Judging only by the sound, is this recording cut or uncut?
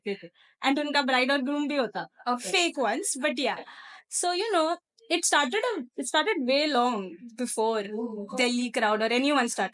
uncut